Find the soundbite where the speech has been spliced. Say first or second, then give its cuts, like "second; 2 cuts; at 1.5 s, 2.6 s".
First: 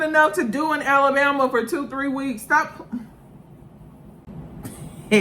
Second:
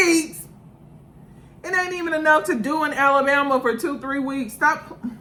first; 1 cut; at 4.3 s